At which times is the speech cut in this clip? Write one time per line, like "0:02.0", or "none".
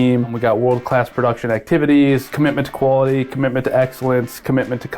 0:02.3